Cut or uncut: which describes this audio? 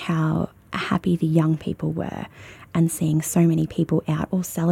uncut